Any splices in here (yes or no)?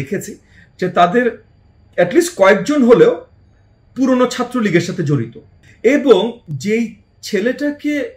no